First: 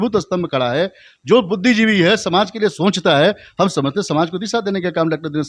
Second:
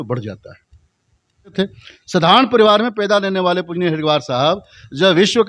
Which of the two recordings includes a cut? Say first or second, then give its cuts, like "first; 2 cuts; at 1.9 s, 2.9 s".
second; 1 cut; at 1.5 s